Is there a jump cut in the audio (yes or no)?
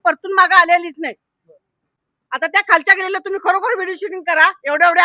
no